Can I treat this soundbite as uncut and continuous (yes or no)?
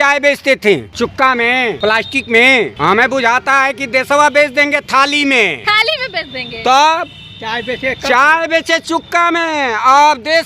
no